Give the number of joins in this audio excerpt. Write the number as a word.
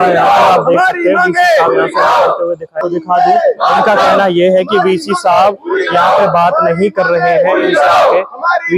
one